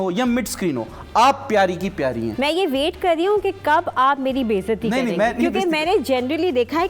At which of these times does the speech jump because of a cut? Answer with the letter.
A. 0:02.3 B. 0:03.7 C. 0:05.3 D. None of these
A